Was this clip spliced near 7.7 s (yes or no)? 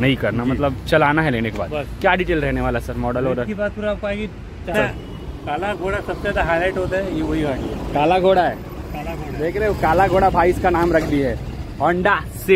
no